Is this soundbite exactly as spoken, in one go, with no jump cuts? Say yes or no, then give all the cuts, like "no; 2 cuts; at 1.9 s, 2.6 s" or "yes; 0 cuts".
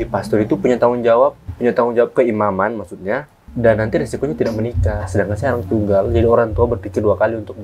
no; 2 cuts; at 1.5 s, 3.4 s